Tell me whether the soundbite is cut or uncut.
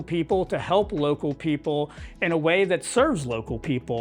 uncut